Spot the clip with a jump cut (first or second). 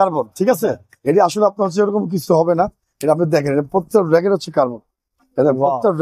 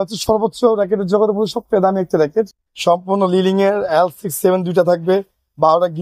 second